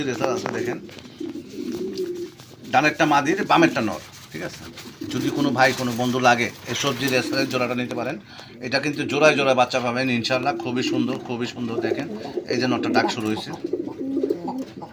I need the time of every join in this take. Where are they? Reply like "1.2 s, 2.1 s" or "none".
none